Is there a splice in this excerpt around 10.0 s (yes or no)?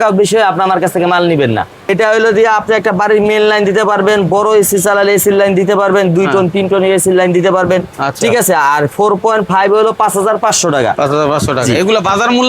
no